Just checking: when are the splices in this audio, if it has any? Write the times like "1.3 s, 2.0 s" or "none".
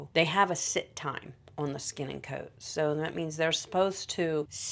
none